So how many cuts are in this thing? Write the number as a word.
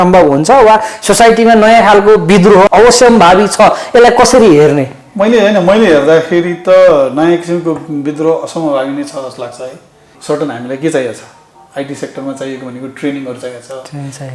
one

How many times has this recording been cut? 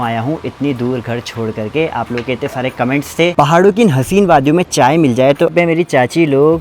two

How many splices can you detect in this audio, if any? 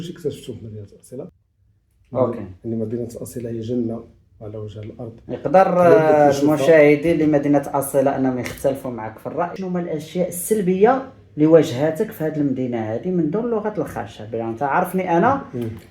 two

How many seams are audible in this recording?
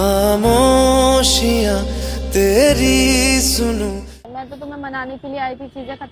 one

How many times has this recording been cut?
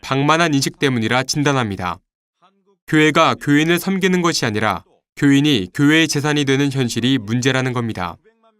one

